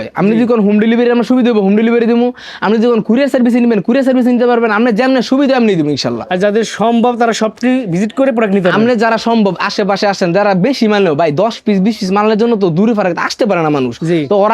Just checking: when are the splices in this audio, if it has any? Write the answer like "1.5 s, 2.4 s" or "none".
none

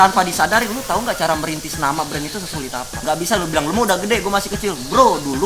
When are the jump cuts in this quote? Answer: 2.9 s

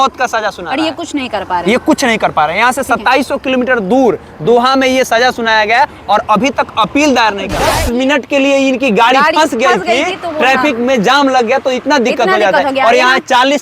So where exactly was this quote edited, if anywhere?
7.6 s

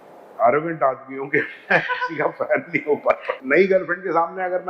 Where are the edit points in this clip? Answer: 3.3 s

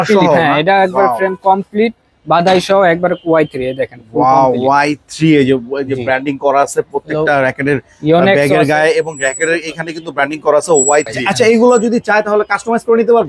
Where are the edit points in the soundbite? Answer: 11.2 s

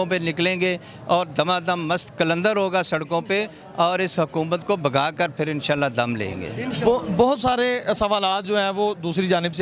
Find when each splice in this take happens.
none

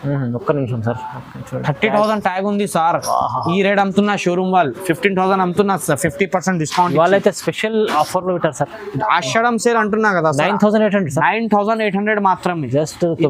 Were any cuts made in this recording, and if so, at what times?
none

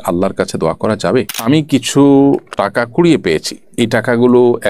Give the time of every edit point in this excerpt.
1.3 s

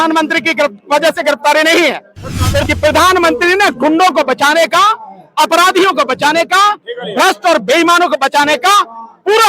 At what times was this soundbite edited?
2.6 s

